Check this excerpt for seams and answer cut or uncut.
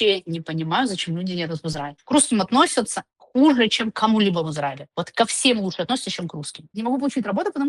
cut